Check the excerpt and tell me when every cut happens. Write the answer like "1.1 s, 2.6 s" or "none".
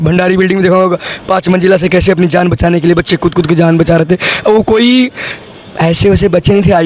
none